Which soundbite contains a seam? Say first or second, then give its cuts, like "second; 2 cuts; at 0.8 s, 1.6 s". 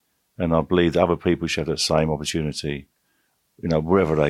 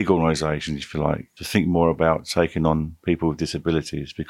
second; 1 cut; at 1.3 s